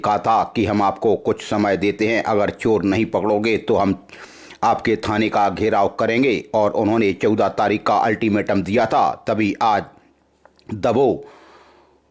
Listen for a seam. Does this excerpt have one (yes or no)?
no